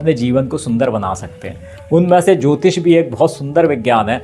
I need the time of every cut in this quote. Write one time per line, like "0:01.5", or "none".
none